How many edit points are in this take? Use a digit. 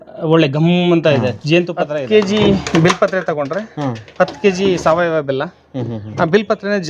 1